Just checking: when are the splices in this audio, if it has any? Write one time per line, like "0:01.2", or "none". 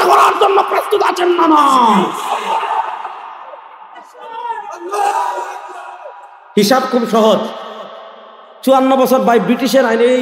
none